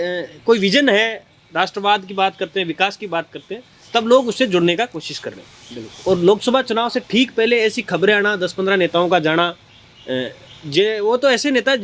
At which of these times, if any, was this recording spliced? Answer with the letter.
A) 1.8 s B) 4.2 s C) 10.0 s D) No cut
D